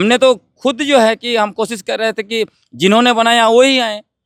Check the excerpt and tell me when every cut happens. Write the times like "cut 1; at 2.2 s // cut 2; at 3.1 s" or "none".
none